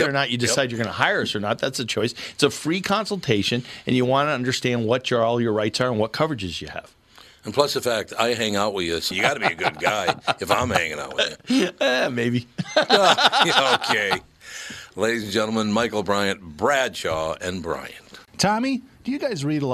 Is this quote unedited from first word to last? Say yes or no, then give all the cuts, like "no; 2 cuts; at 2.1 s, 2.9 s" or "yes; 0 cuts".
no; 1 cut; at 18.2 s